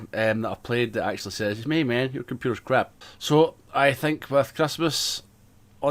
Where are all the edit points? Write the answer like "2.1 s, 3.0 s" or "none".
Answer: 3.1 s

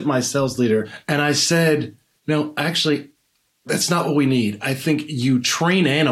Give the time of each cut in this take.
1.0 s

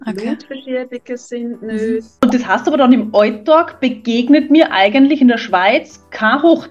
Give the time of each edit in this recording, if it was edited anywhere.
2.1 s

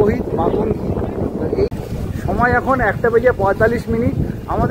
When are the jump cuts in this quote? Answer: 1.7 s

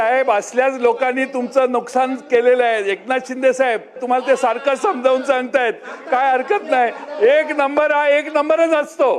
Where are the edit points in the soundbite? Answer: 4.0 s

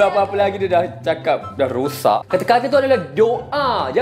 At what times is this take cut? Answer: 2.2 s

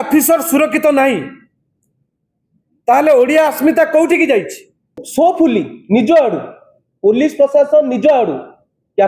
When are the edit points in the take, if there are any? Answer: 5.0 s

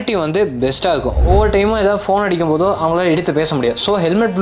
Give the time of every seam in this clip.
1.2 s

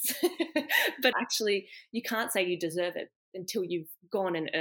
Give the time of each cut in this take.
1.1 s

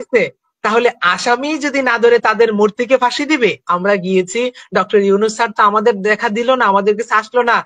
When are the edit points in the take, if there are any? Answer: 3.6 s

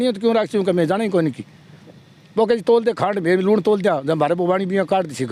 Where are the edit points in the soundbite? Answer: none

